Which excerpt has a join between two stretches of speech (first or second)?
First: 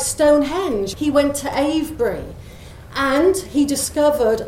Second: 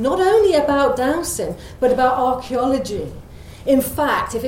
first